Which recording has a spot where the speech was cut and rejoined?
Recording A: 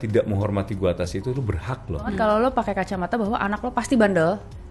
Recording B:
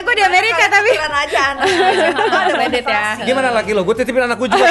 A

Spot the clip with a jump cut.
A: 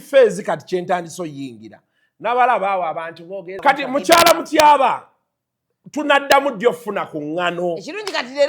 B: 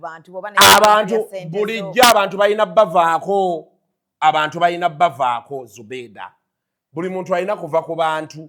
A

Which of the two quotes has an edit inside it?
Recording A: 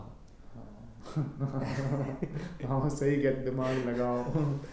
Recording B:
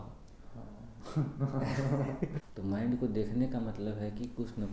B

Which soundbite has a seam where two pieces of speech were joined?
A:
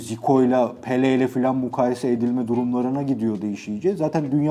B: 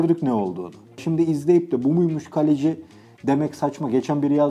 B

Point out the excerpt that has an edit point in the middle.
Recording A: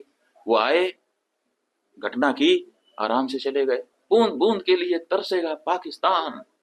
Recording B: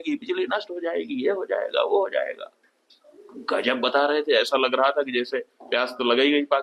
A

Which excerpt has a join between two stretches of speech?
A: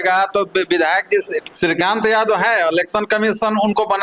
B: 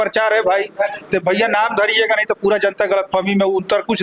A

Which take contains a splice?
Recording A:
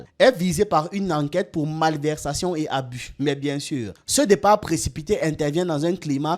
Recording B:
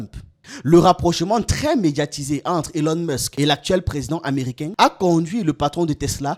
A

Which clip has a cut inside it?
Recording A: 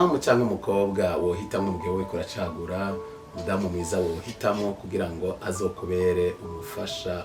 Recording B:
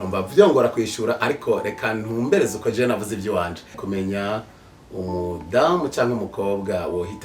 B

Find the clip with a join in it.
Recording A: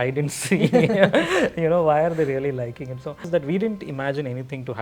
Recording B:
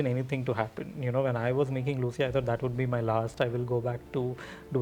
A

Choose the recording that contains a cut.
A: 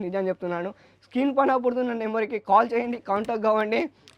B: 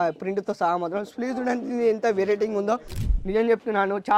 B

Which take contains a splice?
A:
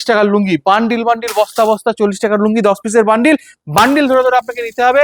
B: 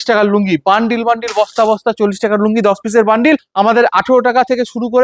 B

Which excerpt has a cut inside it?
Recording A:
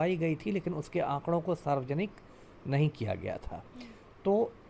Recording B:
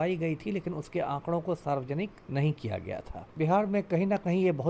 B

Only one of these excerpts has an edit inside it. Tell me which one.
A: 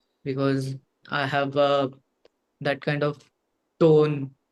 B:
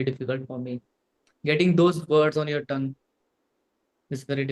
A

